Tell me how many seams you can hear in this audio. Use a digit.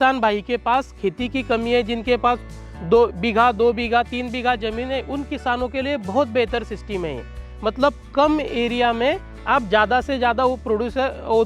0